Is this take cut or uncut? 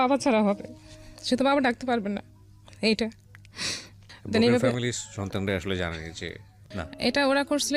cut